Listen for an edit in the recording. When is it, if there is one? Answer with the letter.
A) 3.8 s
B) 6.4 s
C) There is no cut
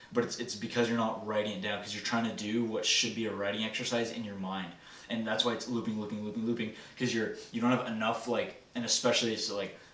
C